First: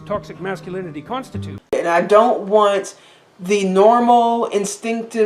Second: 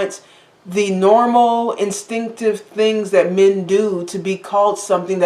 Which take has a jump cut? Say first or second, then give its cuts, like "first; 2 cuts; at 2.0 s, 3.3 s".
first; 1 cut; at 1.7 s